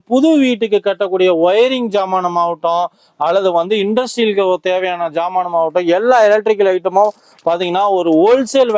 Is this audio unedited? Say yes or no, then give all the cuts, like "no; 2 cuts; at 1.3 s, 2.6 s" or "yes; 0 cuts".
yes; 0 cuts